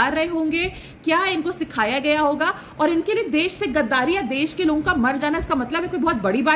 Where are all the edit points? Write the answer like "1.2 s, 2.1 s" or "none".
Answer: none

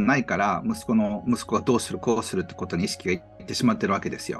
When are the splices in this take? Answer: none

